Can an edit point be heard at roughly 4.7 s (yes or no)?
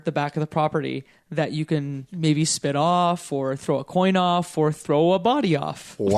no